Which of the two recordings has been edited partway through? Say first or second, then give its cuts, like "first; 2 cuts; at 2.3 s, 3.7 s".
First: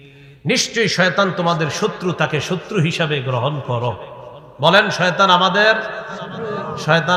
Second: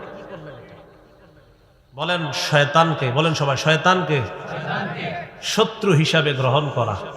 second; 1 cut; at 2.1 s